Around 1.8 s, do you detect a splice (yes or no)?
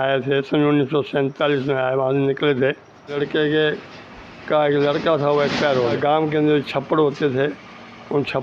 no